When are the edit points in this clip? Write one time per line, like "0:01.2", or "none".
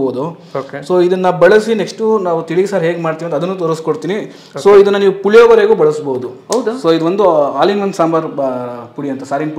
none